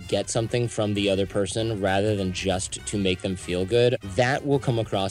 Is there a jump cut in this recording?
yes; 1 cut; at 4.0 s

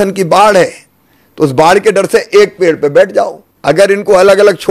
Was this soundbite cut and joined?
yes; 1 cut; at 3.5 s

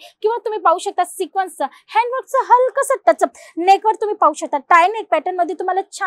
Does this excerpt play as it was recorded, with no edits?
yes; 0 cuts

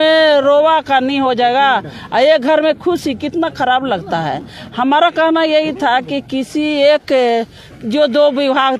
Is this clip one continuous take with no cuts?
yes; 0 cuts

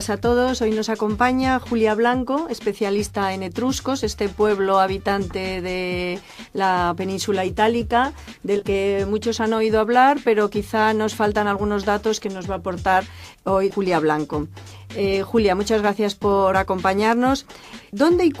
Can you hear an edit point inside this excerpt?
no; 0 cuts

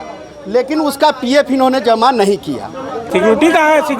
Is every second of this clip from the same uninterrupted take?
no; 1 cut; at 3.0 s

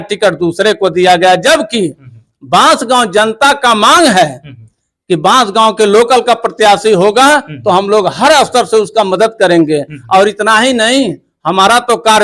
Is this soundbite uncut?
yes; 0 cuts

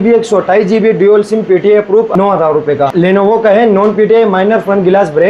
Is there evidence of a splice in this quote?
yes; 2 cuts; at 2.1 s, 2.9 s

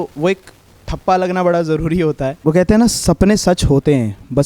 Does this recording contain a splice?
yes; 1 cut; at 2.3 s

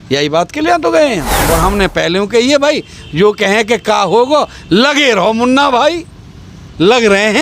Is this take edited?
yes; 1 cut; at 1.3 s

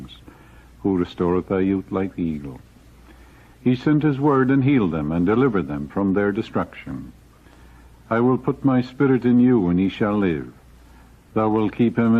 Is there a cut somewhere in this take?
no; 0 cuts

